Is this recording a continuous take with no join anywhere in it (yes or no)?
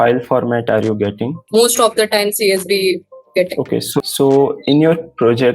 no